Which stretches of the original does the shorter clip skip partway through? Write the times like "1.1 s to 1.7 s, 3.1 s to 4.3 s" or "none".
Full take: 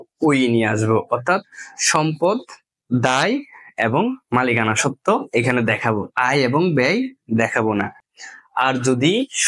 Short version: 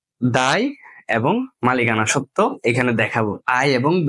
none